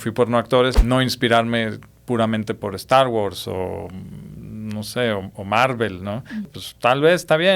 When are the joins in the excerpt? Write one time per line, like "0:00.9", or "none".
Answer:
0:00.8
0:06.5